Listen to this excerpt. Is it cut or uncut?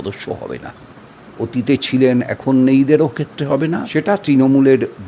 cut